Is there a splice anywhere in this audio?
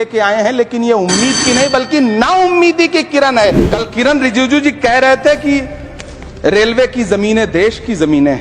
yes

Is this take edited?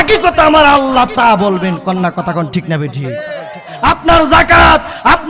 yes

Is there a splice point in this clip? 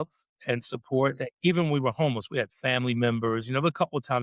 no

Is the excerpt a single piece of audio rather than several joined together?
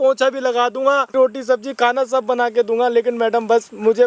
no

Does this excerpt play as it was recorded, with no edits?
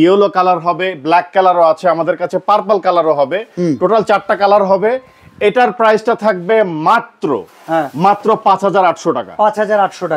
yes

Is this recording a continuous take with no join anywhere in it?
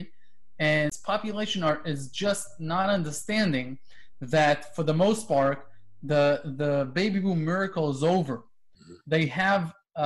no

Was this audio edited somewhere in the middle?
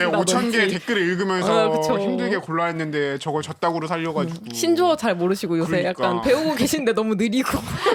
no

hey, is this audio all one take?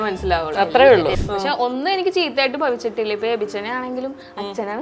no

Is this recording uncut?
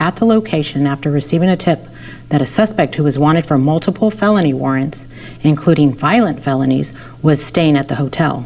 yes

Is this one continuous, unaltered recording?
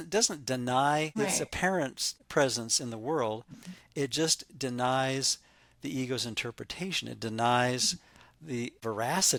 yes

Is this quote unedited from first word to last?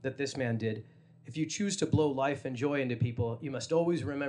yes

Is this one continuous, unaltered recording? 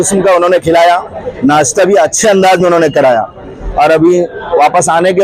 yes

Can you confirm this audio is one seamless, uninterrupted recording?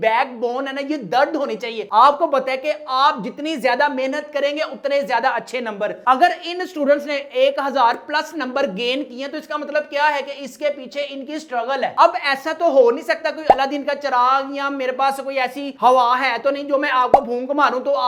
yes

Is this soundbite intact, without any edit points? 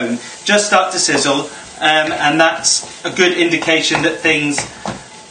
no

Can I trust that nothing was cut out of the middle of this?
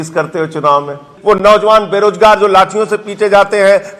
no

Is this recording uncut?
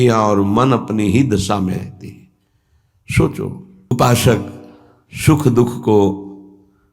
no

